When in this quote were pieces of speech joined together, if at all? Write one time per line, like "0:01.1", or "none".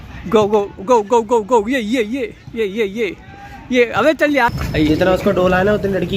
0:04.6